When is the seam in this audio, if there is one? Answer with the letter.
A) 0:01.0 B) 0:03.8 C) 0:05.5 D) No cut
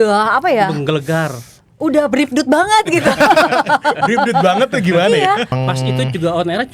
C